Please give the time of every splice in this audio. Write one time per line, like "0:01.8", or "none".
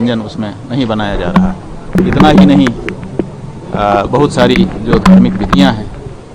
0:01.9

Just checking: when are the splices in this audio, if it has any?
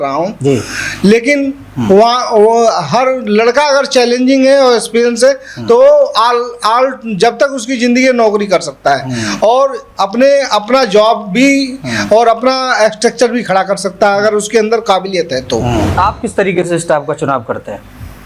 0:15.9

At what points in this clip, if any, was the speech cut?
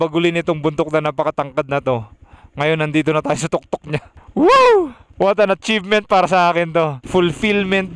0:04.2
0:05.0
0:07.0

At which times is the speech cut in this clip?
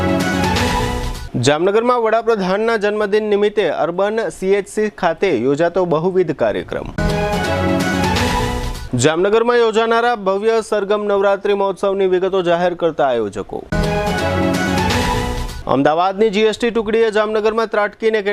none

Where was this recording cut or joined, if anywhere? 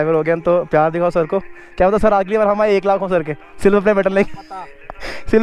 none

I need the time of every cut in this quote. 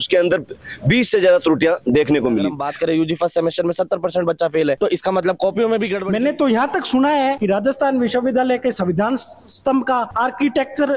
0:02.6
0:06.0

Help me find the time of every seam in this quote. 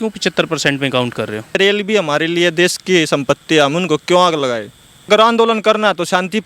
0:01.5
0:05.1

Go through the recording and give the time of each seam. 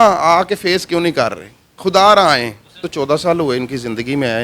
0:02.9

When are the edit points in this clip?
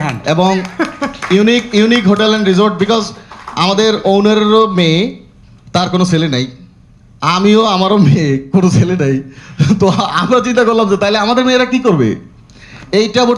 none

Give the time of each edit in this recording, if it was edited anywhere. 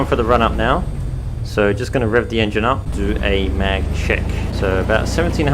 0:02.9
0:04.5

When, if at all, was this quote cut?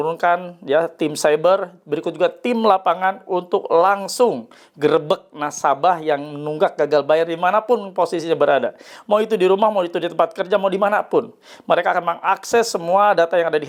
none

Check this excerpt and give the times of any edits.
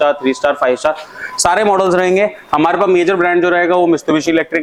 none

